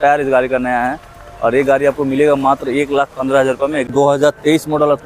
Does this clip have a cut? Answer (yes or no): yes